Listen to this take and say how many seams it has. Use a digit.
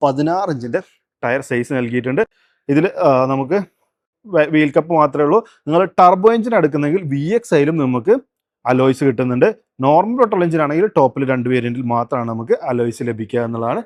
0